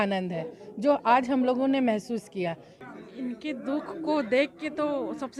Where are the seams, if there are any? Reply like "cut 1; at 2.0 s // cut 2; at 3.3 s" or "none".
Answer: cut 1; at 2.7 s